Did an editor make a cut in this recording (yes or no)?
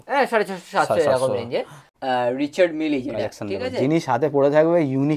yes